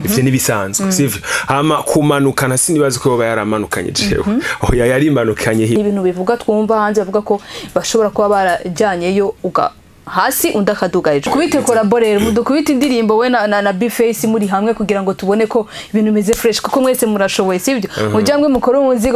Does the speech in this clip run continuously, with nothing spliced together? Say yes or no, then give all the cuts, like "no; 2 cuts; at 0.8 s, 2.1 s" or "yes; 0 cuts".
no; 2 cuts; at 5.8 s, 11.3 s